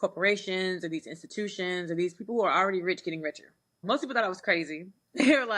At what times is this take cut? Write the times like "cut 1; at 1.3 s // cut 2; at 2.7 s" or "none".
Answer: cut 1; at 3.8 s